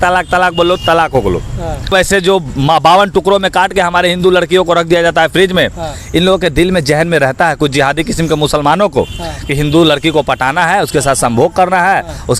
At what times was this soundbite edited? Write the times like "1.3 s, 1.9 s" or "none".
1.9 s